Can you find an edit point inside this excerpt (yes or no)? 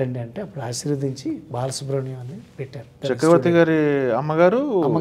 yes